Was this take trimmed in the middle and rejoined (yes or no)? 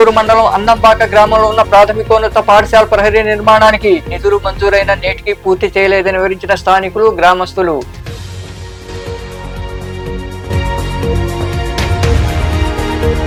no